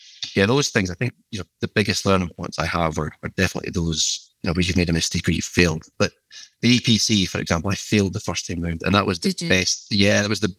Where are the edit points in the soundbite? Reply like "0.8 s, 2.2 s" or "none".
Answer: none